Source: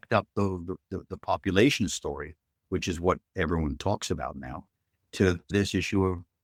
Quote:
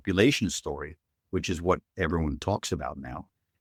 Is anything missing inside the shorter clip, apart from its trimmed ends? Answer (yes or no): no